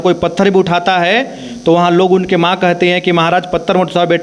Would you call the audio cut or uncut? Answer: uncut